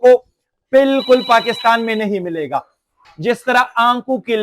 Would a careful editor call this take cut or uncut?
cut